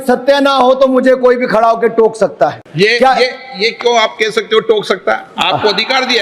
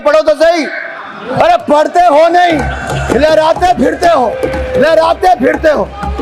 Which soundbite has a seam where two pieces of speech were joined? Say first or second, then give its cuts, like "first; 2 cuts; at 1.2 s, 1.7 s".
first; 1 cut; at 2.6 s